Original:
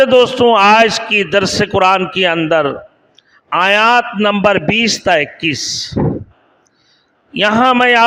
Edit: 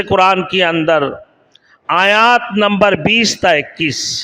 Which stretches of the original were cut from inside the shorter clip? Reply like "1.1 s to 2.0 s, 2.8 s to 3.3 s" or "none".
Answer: none